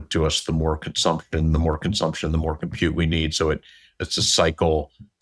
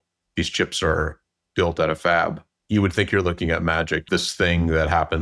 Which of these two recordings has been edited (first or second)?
second